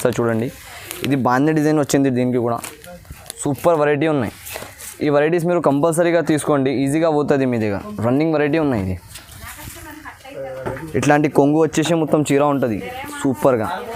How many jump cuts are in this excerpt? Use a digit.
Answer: 0